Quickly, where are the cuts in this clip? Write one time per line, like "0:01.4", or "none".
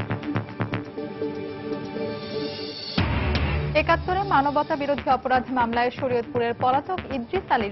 none